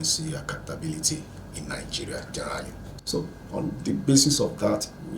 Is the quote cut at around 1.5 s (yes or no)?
no